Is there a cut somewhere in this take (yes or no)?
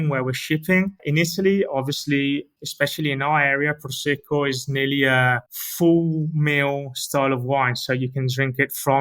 no